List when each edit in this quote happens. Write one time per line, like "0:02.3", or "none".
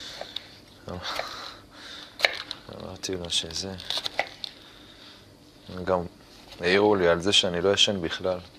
0:04.5